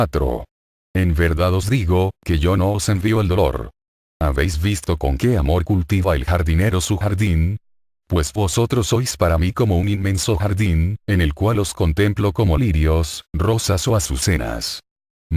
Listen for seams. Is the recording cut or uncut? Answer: uncut